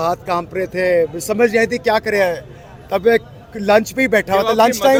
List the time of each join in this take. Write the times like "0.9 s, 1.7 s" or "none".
none